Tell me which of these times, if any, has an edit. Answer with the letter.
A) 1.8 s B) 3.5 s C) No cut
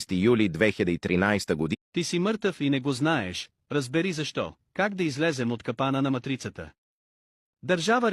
A